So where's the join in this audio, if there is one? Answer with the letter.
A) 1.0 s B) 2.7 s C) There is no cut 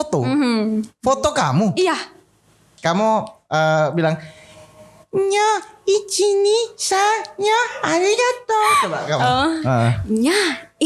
B